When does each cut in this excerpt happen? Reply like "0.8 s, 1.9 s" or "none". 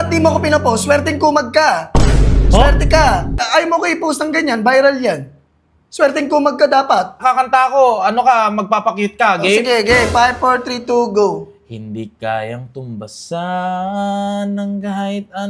3.4 s, 7.2 s